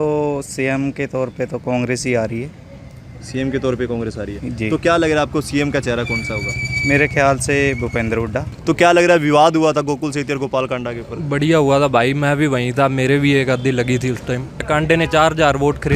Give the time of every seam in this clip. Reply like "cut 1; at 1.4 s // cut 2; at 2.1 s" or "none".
cut 1; at 8.5 s // cut 2; at 14.6 s

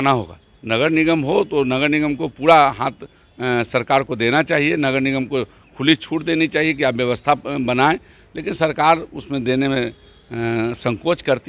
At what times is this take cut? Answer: none

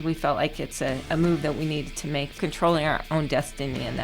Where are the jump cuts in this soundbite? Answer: cut 1; at 1.0 s // cut 2; at 2.4 s

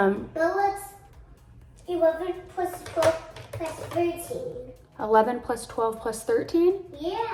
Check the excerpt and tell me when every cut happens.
none

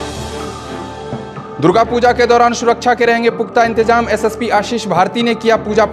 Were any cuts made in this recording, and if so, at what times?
cut 1; at 1.5 s

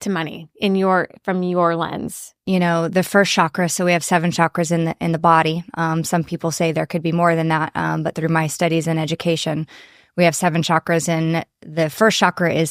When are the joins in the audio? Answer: cut 1; at 2.3 s

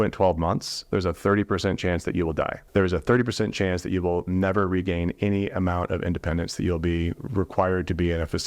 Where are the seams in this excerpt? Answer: cut 1; at 2.6 s

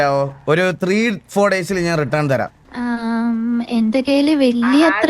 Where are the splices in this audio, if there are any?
cut 1; at 2.6 s

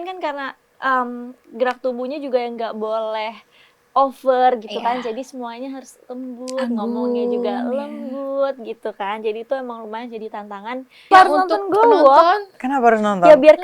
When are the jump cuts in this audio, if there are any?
cut 1; at 11.1 s

